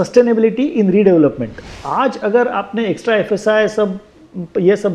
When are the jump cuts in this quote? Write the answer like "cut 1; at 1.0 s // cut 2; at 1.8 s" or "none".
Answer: cut 1; at 1.7 s